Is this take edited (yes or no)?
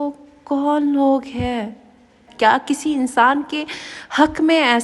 yes